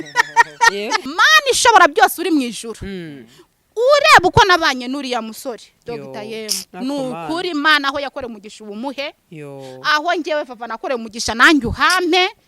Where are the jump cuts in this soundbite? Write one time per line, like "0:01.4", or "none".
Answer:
0:01.1